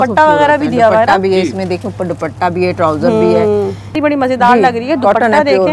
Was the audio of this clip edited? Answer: yes; 1 cut; at 4.0 s

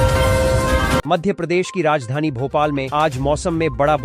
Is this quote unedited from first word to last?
no; 1 cut; at 1.0 s

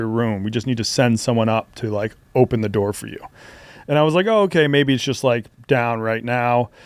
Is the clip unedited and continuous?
yes; 0 cuts

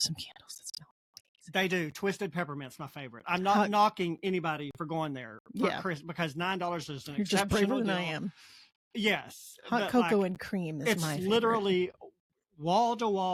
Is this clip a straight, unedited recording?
yes; 0 cuts

